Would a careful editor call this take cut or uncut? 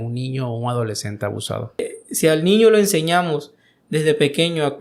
cut